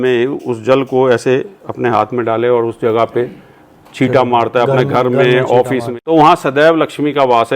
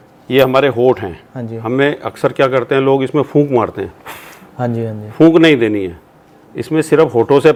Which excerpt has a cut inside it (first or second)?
first